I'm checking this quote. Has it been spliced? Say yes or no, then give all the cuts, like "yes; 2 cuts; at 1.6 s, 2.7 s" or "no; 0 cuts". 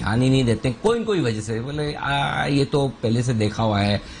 no; 0 cuts